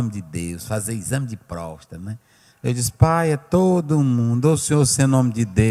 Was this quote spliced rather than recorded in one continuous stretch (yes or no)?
no